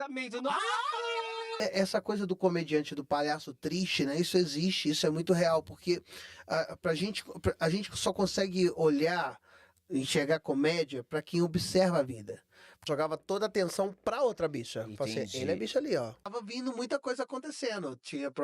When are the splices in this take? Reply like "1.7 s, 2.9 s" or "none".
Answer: 1.6 s, 12.8 s, 16.3 s